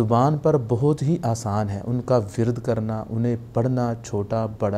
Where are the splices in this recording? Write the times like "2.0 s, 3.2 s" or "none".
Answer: none